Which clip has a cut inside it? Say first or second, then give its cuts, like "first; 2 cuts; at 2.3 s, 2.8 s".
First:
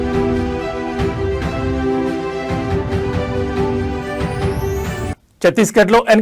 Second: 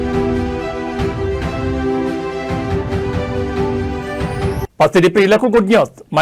first; 1 cut; at 4.6 s